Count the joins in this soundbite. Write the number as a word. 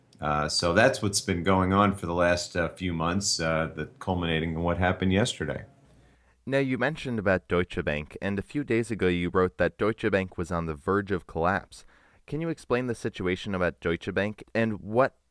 one